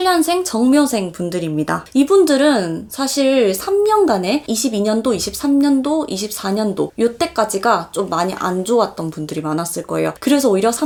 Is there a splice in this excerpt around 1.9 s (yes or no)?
no